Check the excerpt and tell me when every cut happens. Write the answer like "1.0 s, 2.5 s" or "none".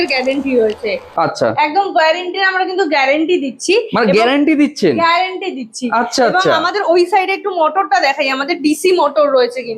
none